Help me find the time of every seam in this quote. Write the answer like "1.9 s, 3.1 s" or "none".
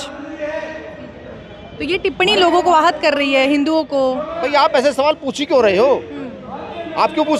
4.4 s